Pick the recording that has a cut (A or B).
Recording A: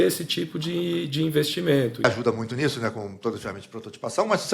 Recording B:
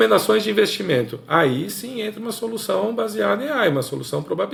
A